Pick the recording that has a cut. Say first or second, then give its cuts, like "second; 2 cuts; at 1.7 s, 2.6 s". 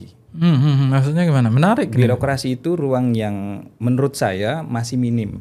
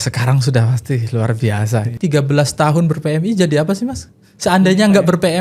second; 1 cut; at 1.9 s